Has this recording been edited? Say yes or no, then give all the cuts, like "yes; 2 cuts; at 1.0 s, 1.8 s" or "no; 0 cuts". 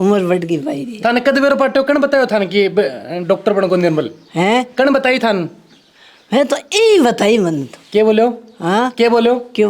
no; 0 cuts